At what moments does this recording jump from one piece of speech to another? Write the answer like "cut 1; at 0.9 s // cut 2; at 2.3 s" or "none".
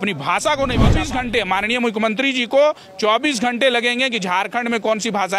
cut 1; at 1.0 s